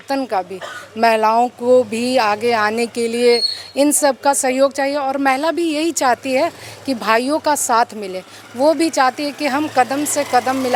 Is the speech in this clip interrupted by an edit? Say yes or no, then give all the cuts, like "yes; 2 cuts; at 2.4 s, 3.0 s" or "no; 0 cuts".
no; 0 cuts